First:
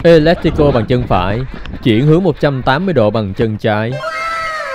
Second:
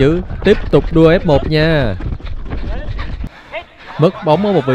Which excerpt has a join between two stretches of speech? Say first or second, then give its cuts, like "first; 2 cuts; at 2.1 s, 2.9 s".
second; 1 cut; at 3.3 s